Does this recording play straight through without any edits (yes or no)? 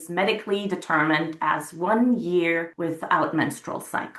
no